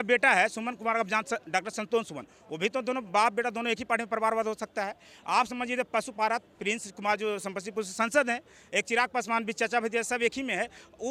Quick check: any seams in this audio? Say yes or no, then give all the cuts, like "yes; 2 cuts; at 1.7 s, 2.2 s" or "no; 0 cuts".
no; 0 cuts